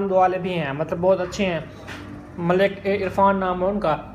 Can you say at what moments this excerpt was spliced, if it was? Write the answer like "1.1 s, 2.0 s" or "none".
none

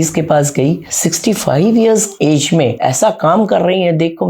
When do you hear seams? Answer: 0.9 s, 2.4 s

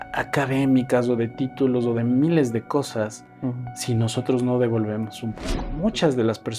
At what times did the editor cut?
5.7 s

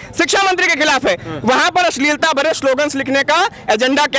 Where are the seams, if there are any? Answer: none

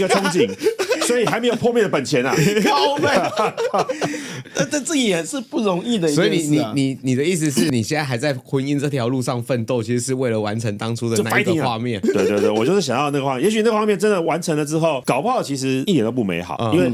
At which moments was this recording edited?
none

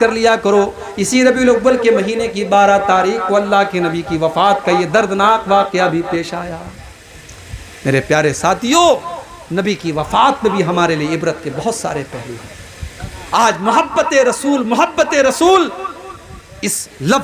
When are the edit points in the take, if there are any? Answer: none

